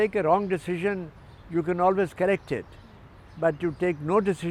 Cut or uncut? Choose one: uncut